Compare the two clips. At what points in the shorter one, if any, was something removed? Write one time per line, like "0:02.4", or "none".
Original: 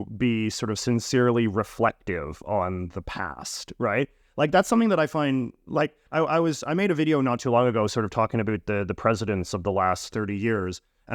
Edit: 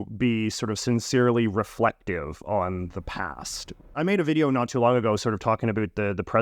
0:03.8